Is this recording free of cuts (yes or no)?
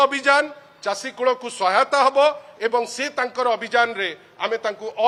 yes